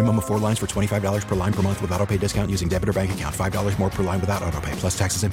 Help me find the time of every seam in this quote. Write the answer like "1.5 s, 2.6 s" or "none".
none